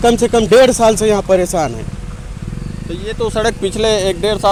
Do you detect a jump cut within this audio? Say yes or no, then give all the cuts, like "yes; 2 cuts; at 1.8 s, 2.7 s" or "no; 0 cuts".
no; 0 cuts